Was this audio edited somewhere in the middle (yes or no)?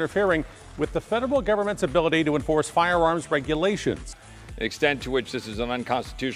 no